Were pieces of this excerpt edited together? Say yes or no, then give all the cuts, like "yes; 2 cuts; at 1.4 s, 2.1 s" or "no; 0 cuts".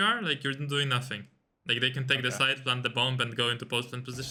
no; 0 cuts